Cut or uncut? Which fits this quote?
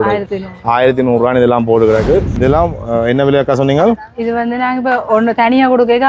cut